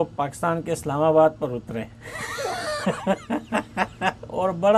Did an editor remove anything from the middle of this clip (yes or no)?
no